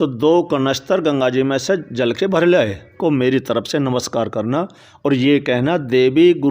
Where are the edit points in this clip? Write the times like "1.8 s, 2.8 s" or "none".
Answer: 2.9 s